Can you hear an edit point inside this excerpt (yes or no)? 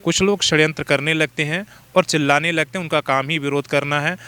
no